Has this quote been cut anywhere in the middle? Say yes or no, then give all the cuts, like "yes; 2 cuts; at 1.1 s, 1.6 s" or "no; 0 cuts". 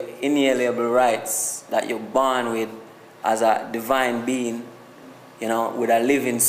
no; 0 cuts